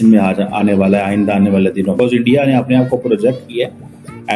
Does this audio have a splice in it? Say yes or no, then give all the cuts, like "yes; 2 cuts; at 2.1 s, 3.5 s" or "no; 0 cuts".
yes; 1 cut; at 2.0 s